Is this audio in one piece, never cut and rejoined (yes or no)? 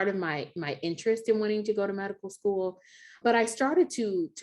no